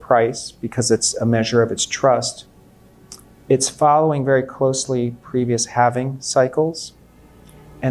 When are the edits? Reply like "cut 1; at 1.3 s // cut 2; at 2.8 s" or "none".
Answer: none